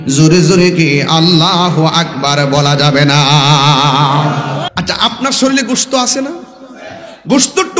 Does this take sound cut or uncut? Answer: cut